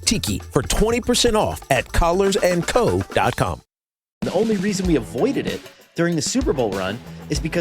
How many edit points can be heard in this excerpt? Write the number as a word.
one